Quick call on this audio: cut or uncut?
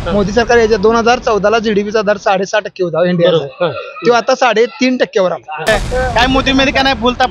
cut